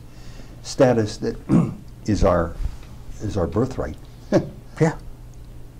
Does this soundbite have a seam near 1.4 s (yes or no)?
no